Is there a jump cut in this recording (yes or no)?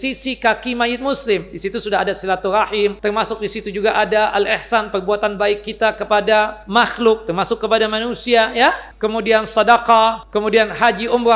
yes